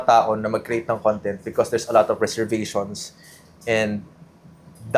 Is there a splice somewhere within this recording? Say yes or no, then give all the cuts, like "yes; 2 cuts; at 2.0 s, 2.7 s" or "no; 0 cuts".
no; 0 cuts